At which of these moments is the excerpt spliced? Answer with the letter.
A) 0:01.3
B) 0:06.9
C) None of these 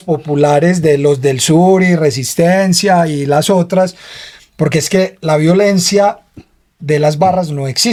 C